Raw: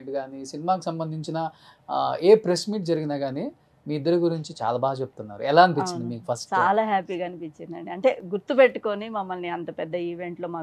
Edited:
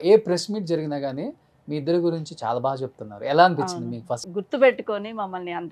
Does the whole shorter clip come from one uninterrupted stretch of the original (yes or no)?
no